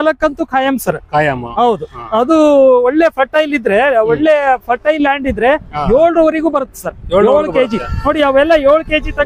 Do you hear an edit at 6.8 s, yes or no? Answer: no